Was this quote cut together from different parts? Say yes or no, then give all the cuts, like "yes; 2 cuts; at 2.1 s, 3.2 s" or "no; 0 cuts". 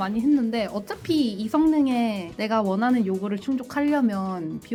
no; 0 cuts